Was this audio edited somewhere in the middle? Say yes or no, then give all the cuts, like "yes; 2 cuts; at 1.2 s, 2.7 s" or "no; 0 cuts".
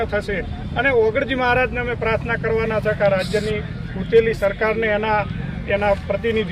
no; 0 cuts